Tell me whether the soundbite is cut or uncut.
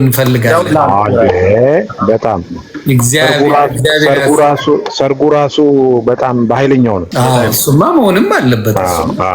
cut